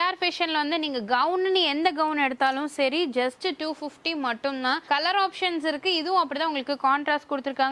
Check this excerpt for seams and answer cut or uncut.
uncut